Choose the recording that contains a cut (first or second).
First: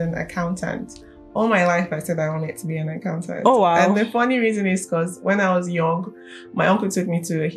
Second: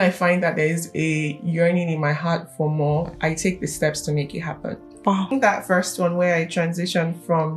second